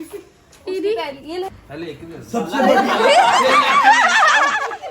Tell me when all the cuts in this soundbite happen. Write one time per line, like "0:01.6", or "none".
0:01.6